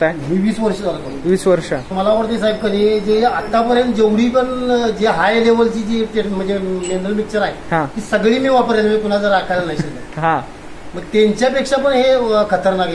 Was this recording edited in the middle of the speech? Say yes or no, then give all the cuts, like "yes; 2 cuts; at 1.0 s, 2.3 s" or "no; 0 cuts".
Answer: yes; 1 cut; at 1.9 s